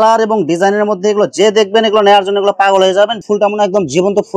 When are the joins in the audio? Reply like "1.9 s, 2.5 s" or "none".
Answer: 3.2 s

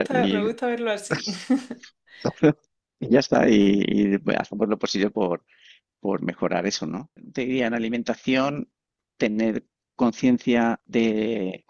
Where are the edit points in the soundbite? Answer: 7.3 s

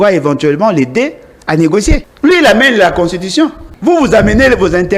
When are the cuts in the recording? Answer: 2.1 s, 3.7 s

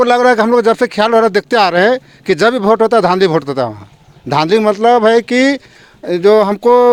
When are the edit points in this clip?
none

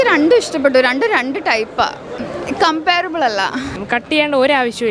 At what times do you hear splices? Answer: 2.2 s, 3.8 s

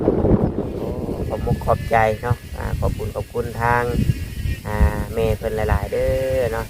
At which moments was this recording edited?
1.0 s

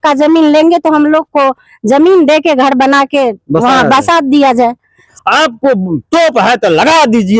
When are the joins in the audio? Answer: 5.1 s

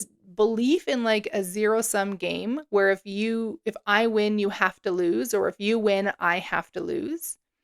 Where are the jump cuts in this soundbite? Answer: none

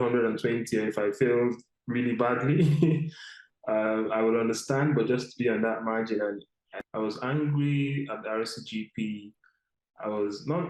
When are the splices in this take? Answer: 6.7 s

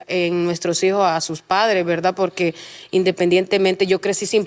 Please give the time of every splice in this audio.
none

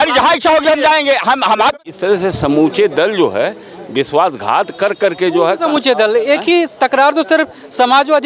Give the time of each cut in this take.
1.8 s

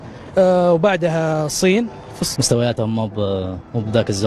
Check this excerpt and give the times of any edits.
2.2 s

